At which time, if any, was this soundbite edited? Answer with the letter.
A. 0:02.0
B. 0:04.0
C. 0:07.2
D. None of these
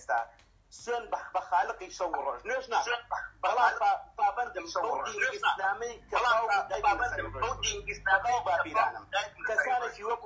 B